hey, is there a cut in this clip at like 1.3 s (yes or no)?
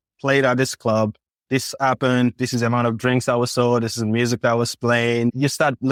no